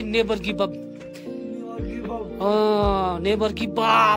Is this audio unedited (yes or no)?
yes